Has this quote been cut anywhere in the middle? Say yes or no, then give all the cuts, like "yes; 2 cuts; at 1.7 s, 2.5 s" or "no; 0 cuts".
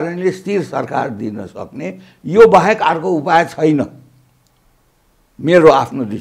no; 0 cuts